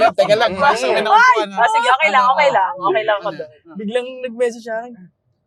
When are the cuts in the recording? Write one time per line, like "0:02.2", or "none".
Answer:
none